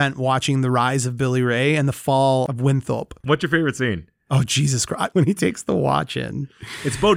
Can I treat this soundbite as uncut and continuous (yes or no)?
no